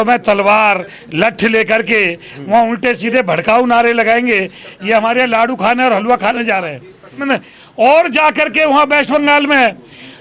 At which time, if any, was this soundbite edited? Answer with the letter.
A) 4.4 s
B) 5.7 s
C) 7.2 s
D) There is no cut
C